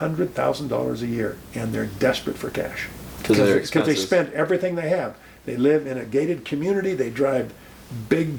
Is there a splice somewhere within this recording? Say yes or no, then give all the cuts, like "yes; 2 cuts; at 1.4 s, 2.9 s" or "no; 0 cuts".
no; 0 cuts